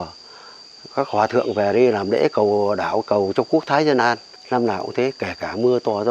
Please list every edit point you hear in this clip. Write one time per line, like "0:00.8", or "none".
0:04.3

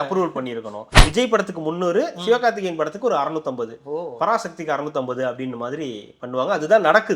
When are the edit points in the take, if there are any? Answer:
0:01.0

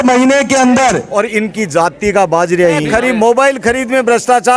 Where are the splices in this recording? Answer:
0:01.0
0:02.9

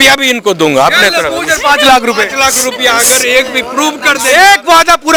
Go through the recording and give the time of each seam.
none

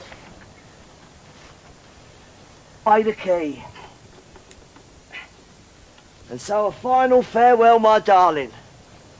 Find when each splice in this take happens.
none

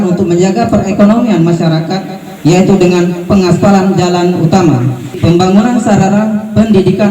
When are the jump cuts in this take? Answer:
0:05.1

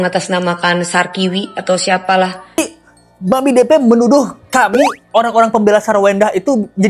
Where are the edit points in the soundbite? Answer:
0:02.6

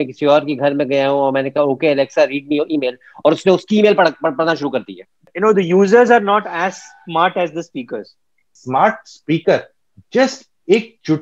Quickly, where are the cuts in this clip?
0:05.2
0:08.5

